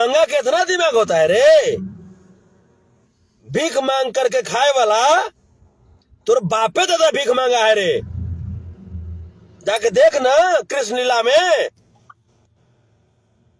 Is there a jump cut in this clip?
no; 0 cuts

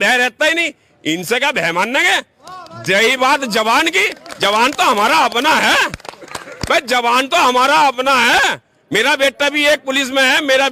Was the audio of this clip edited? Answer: no; 0 cuts

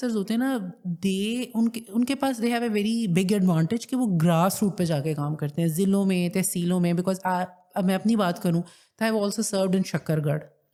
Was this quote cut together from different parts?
no; 0 cuts

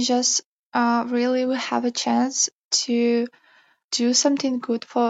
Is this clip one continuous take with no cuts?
no; 1 cut; at 3.8 s

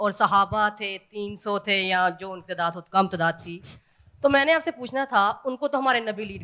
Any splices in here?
no; 0 cuts

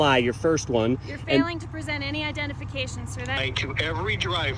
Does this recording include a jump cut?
yes; 1 cut; at 3.4 s

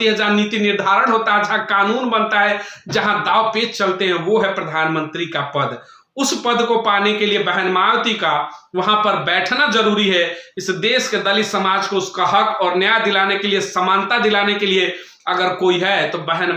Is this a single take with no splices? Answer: yes; 0 cuts

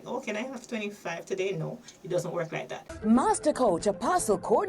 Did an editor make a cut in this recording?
yes; 1 cut; at 2.8 s

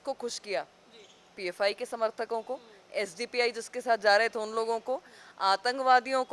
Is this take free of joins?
yes; 0 cuts

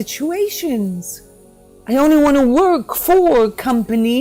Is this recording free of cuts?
yes; 0 cuts

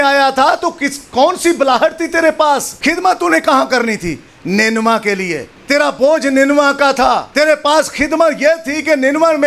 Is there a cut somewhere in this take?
yes; 3 cuts; at 2.7 s, 5.5 s, 7.3 s

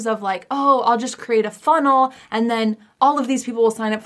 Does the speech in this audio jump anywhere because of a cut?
yes; 1 cut; at 2.9 s

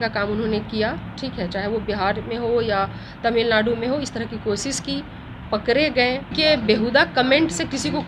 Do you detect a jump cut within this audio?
yes; 1 cut; at 6.4 s

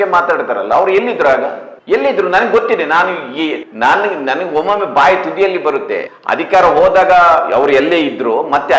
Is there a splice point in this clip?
yes; 2 cuts; at 3.6 s, 6.1 s

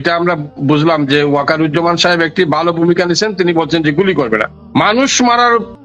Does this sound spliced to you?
yes; 1 cut; at 4.6 s

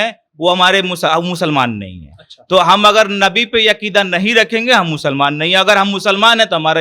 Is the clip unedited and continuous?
yes; 0 cuts

